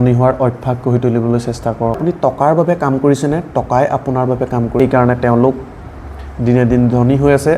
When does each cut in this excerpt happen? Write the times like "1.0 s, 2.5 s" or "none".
2.0 s, 4.8 s